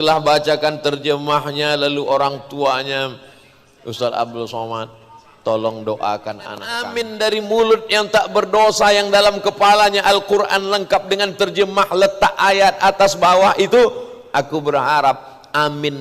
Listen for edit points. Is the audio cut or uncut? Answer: cut